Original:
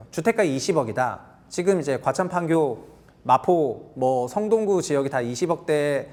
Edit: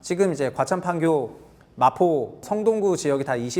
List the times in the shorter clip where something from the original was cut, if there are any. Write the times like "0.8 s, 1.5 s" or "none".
2.4 s

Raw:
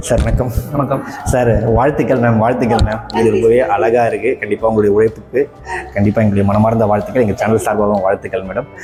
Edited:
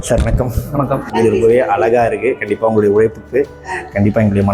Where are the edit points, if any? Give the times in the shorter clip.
1.1 s

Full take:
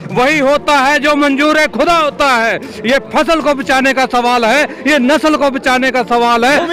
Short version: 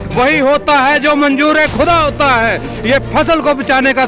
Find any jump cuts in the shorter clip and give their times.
none

